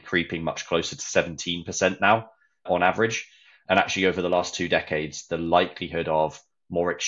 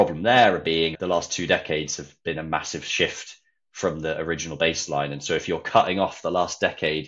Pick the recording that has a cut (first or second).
second